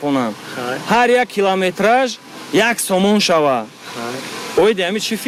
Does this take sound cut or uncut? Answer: uncut